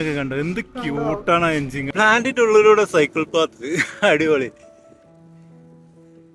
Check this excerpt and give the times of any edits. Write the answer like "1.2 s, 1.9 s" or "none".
1.9 s